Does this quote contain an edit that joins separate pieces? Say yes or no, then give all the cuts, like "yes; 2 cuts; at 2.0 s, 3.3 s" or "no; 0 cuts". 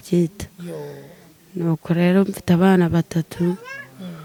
no; 0 cuts